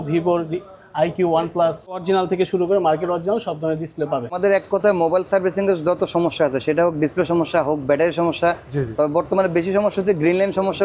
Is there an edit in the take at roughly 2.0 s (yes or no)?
yes